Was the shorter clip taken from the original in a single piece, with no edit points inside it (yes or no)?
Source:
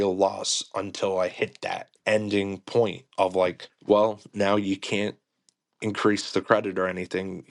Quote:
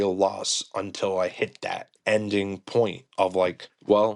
yes